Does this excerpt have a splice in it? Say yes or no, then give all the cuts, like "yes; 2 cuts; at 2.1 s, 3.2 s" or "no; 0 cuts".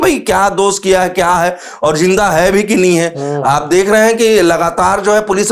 no; 0 cuts